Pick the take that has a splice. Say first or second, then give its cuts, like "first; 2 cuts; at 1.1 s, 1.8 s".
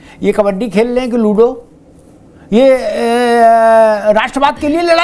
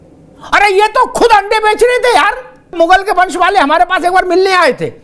second; 1 cut; at 2.7 s